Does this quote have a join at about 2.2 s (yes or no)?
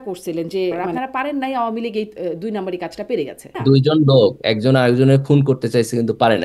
no